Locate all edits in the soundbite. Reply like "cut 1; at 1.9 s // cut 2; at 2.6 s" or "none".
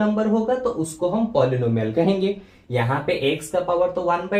none